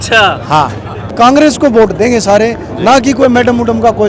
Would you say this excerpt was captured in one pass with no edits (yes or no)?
no